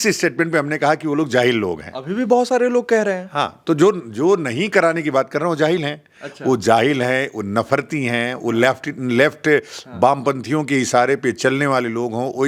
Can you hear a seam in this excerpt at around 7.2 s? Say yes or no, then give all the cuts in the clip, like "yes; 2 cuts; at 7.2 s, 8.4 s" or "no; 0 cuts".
no; 0 cuts